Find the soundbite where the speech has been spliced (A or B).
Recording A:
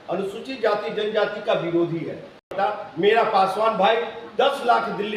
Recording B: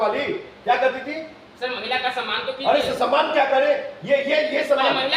A